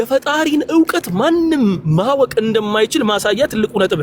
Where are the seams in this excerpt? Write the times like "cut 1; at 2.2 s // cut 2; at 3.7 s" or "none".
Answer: none